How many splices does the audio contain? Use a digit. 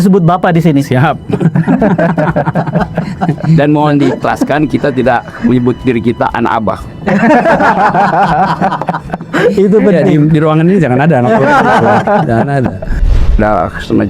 0